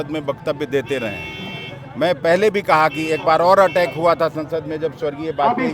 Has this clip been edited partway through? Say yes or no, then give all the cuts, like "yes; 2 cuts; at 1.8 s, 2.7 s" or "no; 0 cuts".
no; 0 cuts